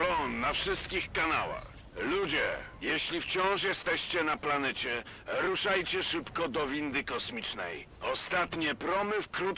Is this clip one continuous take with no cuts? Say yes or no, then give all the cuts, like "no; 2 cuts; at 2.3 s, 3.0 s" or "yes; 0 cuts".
yes; 0 cuts